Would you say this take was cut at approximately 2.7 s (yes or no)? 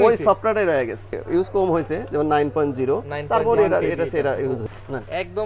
no